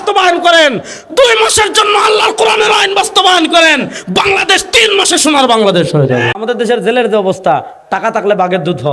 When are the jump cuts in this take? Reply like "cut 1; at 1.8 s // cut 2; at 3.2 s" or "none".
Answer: cut 1; at 6.4 s

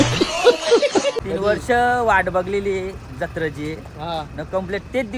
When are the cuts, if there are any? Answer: cut 1; at 1.2 s

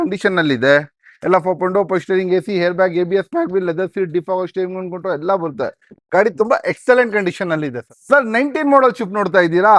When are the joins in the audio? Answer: cut 1; at 7.9 s

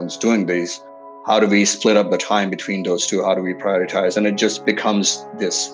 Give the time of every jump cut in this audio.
cut 1; at 1.2 s // cut 2; at 4.6 s

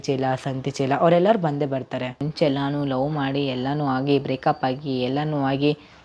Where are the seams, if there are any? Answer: cut 1; at 2.2 s

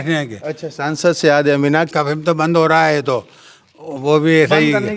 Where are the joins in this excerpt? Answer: cut 1; at 1.9 s

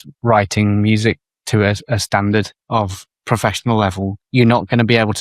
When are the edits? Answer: cut 1; at 2.9 s // cut 2; at 4.2 s

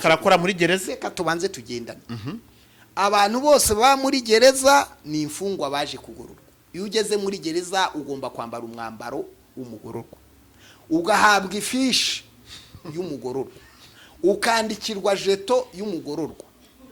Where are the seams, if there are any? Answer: none

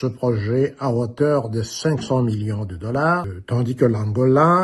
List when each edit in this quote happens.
cut 1; at 3.4 s

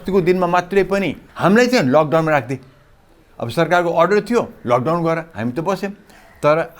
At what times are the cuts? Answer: cut 1; at 1.2 s

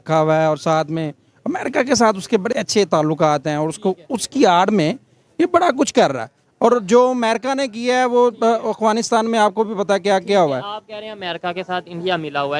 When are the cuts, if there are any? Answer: none

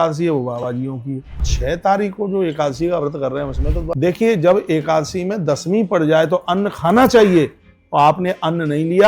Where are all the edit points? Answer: cut 1; at 1.5 s // cut 2; at 3.9 s

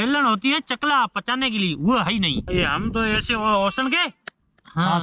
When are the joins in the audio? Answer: cut 1; at 2.4 s

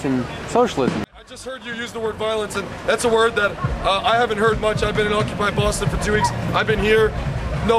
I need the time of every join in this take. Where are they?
cut 1; at 1.0 s

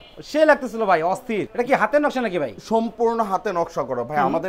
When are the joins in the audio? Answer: none

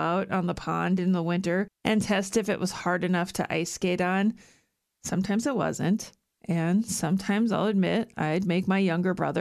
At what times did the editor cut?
cut 1; at 1.7 s

